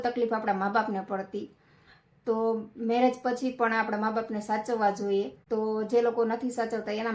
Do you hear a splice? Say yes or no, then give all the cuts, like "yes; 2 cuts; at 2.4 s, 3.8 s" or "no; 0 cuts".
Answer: no; 0 cuts